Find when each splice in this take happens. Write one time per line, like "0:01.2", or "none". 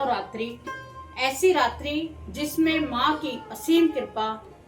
none